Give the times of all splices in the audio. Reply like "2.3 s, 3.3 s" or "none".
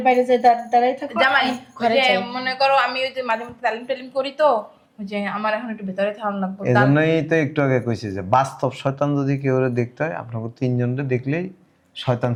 none